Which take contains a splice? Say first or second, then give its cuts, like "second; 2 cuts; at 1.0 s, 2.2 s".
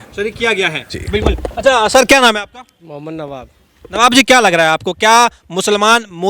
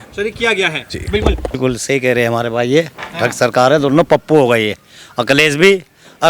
second; 1 cut; at 1.6 s